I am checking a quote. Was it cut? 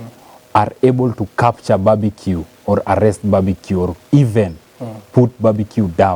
no; 0 cuts

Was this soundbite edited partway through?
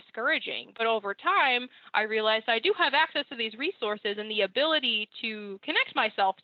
no; 0 cuts

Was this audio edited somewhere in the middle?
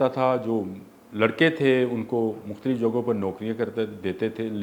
no; 0 cuts

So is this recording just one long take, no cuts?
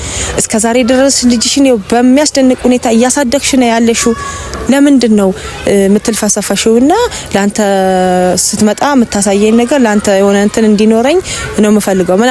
yes; 0 cuts

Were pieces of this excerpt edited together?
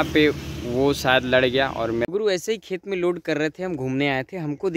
yes; 1 cut; at 2.1 s

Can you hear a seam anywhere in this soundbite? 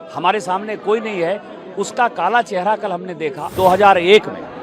yes; 1 cut; at 3.5 s

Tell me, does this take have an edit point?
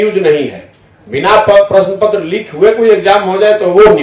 no; 0 cuts

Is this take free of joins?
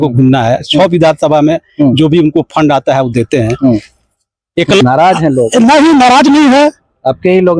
no; 1 cut; at 4.8 s

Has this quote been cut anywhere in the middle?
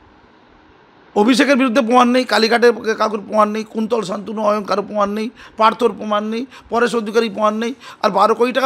no; 0 cuts

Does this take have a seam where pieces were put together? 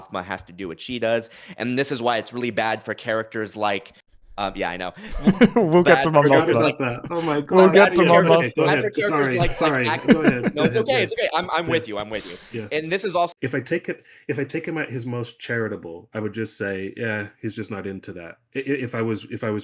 yes; 1 cut; at 13.3 s

